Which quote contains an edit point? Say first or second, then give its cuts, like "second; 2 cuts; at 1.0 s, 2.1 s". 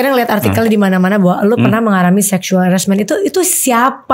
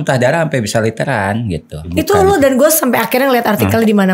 second; 1 cut; at 1.8 s